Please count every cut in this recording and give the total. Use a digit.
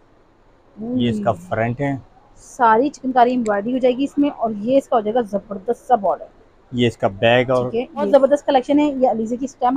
1